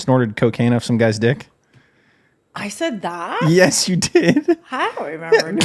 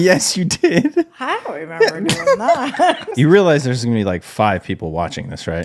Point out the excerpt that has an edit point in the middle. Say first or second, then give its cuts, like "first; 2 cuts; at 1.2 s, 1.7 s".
second; 1 cut; at 3.1 s